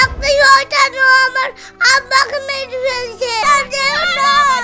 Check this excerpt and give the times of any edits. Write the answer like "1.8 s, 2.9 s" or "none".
3.4 s